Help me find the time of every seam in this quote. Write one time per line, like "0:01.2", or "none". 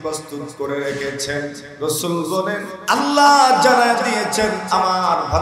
0:01.6
0:02.7

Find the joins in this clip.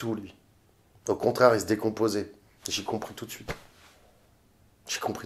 none

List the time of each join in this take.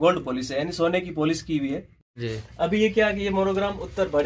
0:02.0

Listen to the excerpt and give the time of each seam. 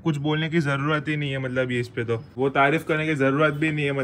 0:02.3

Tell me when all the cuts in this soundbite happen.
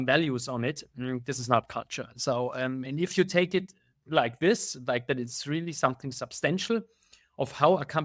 none

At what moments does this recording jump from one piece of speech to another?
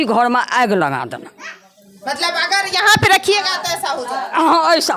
none

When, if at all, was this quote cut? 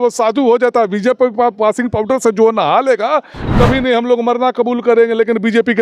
0:03.4

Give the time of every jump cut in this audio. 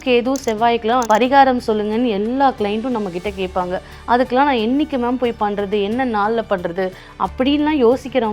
0:01.0

